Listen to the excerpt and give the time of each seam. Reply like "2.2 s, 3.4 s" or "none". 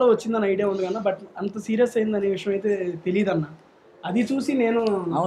none